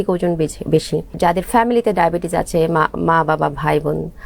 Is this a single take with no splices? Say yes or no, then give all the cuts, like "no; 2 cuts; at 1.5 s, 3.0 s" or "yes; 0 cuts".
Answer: no; 1 cut; at 1.1 s